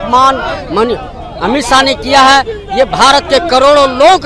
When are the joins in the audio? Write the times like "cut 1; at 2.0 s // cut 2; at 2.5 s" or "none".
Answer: none